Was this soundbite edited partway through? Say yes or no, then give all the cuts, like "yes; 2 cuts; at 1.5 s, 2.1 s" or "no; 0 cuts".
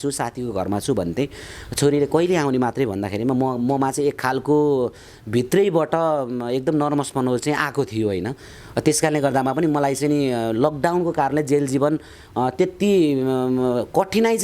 no; 0 cuts